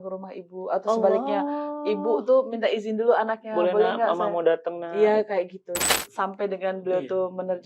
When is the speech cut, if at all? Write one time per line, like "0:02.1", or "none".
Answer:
0:05.8

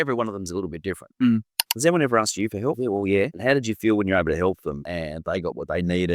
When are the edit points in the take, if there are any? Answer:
0:01.7
0:03.2
0:04.9

